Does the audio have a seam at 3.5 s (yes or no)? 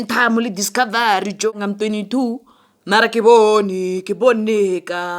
no